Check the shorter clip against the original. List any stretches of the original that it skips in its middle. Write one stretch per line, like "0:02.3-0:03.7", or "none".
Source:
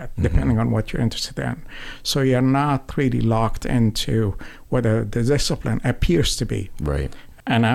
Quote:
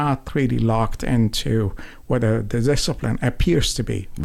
none